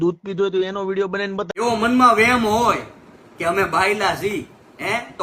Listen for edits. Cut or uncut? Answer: cut